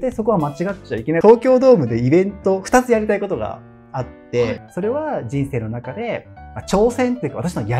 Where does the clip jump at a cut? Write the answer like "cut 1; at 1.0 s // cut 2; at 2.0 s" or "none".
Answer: cut 1; at 1.2 s // cut 2; at 4.6 s